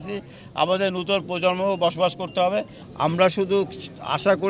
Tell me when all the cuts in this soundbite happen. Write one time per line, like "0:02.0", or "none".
0:02.8